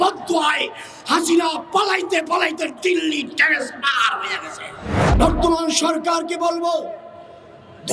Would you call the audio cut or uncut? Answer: cut